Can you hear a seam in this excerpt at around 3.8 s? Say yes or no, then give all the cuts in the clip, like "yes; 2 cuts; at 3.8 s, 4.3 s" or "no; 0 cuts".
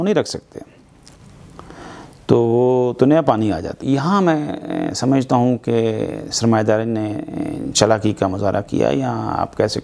yes; 1 cut; at 3.8 s